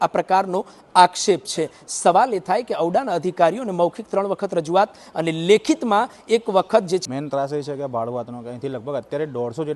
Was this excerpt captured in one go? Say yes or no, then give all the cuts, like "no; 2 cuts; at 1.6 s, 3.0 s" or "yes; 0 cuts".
no; 1 cut; at 7.0 s